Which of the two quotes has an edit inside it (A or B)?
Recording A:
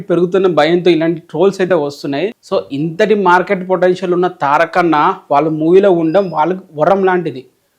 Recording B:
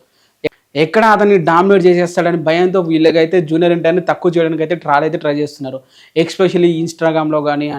A